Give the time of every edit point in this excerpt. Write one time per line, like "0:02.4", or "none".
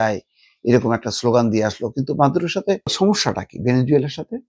0:02.9